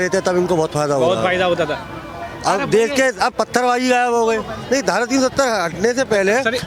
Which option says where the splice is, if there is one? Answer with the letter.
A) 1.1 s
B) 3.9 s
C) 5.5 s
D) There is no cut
D